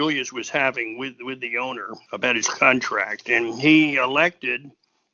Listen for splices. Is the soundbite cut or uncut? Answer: cut